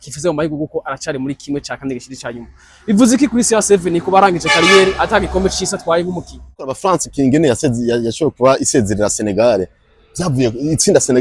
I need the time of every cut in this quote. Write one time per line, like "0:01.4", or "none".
0:06.7

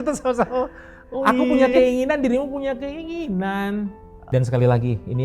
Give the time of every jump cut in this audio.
0:04.1

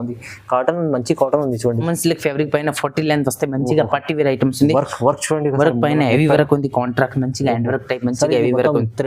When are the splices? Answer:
0:01.8

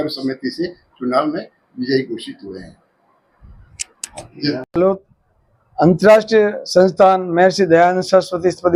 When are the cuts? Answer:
0:04.7

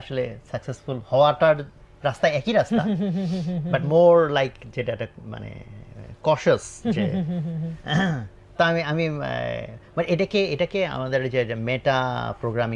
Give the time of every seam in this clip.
none

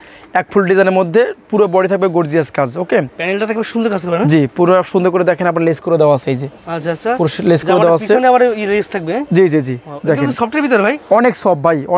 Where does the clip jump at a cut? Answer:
none

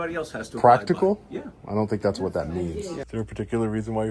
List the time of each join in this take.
0:03.0

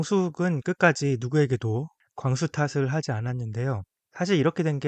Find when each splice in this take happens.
0:02.0
0:04.0

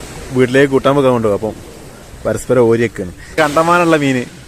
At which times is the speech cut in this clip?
0:03.4

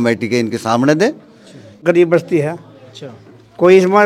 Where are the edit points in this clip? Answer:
0:01.8

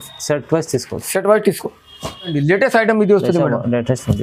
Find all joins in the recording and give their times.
0:02.3

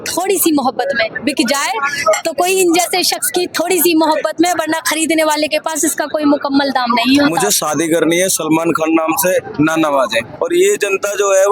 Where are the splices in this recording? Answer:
0:07.5
0:10.3

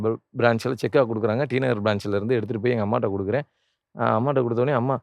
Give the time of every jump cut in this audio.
none

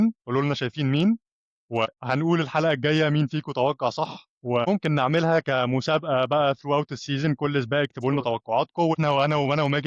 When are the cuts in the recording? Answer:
0:09.0

